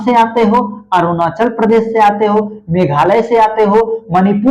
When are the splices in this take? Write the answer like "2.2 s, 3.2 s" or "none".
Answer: none